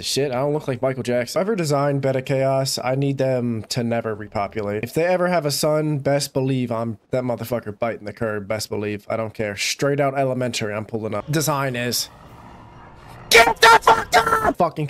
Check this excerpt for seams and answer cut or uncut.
cut